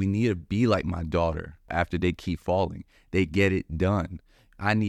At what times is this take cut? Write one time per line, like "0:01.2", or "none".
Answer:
0:01.7